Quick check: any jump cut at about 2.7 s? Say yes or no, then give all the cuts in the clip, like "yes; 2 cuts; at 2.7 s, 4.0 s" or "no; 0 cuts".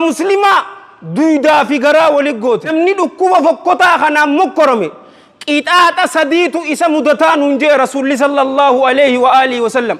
yes; 1 cut; at 2.7 s